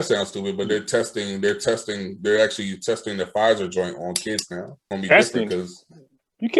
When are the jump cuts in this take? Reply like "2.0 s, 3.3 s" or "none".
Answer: 4.8 s